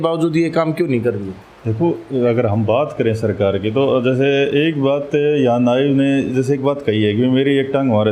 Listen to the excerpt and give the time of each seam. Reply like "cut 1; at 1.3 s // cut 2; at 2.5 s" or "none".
none